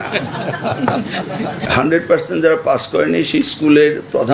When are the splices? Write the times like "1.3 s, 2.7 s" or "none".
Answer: 1.6 s